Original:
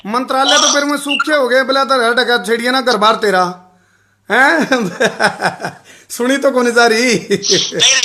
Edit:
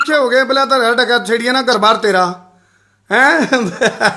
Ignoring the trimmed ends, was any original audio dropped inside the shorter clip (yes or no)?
no